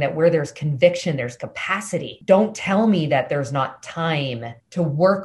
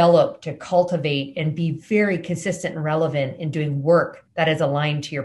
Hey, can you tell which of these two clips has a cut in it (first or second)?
second